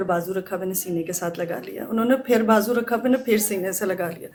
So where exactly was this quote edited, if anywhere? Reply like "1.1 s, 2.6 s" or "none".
none